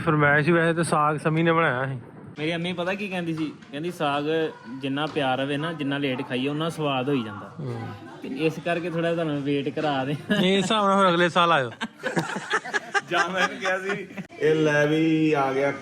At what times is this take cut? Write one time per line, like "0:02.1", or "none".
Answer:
0:02.3
0:14.3

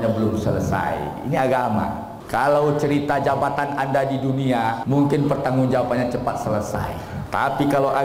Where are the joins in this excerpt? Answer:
0:02.1
0:04.8
0:07.1

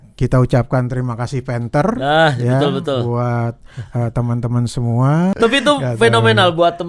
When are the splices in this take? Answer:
0:05.3

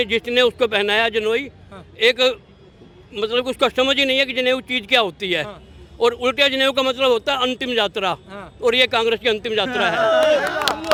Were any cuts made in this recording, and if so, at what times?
none

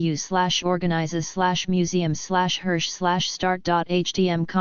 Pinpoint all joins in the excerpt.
none

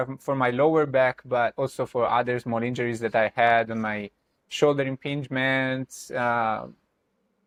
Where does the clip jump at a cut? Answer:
none

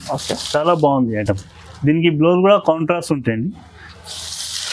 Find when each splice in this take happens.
none

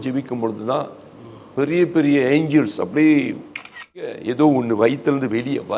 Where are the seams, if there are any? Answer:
0:04.0

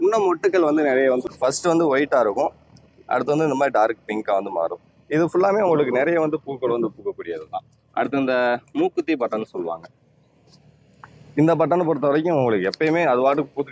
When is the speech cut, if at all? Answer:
0:01.3

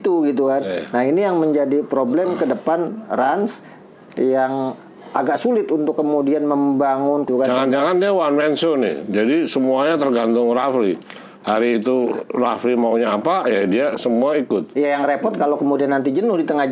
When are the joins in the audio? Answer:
0:07.3

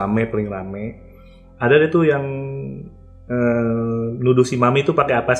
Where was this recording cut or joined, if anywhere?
none

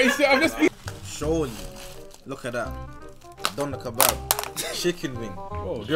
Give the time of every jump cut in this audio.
0:00.7
0:03.3

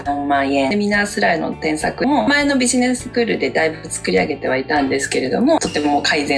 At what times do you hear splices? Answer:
0:00.7
0:02.0
0:05.6

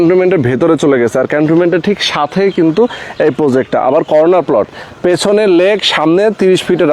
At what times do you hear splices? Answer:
none

